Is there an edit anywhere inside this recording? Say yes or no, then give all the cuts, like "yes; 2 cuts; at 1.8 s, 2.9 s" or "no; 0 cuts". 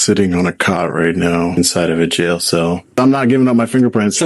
yes; 2 cuts; at 1.6 s, 3.0 s